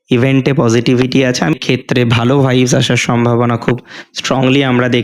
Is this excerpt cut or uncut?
cut